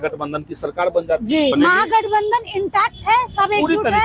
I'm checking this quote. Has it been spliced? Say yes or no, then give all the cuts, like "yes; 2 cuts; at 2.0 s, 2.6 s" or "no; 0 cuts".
yes; 1 cut; at 1.5 s